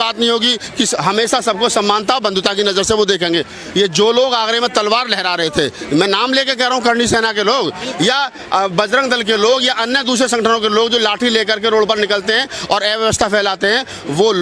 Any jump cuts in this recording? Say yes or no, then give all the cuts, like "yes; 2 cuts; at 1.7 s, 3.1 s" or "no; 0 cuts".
no; 0 cuts